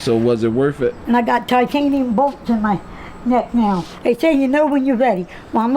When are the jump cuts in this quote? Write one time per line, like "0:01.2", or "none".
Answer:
0:01.0
0:03.9